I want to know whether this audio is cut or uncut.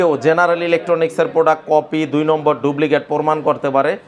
uncut